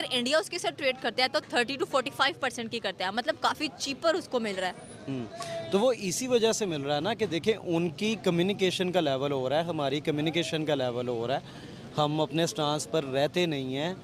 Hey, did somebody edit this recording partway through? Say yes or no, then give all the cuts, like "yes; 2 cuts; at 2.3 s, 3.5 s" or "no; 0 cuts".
no; 0 cuts